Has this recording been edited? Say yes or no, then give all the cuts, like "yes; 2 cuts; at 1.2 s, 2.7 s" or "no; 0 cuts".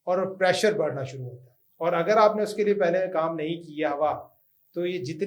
no; 0 cuts